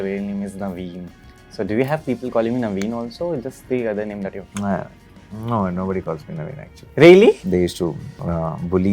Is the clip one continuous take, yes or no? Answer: no